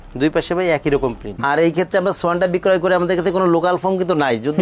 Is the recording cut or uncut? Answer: cut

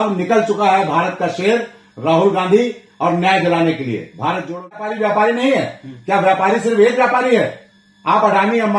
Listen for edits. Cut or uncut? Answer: cut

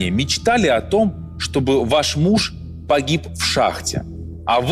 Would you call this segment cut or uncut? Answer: uncut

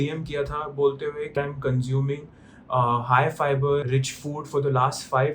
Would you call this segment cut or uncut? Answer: cut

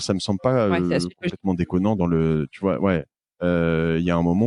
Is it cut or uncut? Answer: uncut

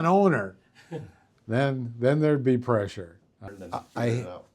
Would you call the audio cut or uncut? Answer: cut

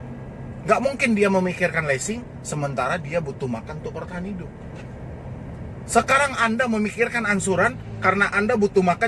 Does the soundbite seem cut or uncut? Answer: uncut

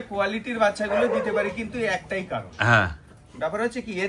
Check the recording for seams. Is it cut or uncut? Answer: uncut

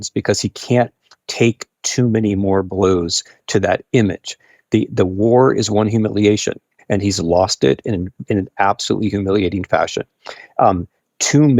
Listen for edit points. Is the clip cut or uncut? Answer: cut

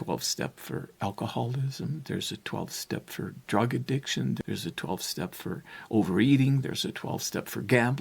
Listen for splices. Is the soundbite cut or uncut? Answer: cut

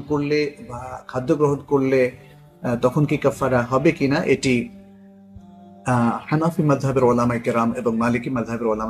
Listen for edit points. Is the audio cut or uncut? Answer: uncut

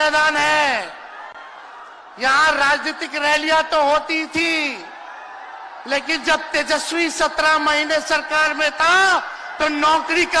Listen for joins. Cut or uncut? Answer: uncut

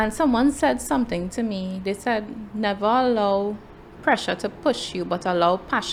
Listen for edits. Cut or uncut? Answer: uncut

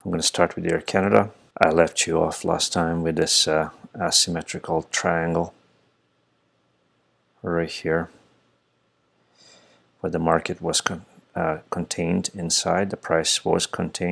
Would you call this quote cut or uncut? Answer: cut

